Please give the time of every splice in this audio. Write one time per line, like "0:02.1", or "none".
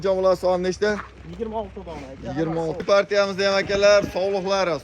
0:02.8